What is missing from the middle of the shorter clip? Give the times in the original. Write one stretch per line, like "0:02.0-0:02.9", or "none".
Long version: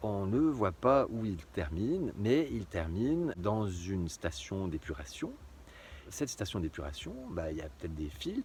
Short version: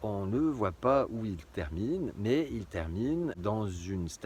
none